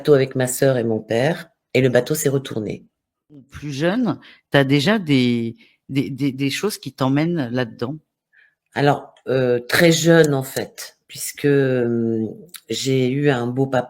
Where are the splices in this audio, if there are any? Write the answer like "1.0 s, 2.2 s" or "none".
3.5 s